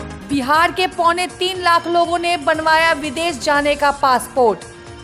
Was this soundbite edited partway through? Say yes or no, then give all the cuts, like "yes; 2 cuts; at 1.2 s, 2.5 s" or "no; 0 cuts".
no; 0 cuts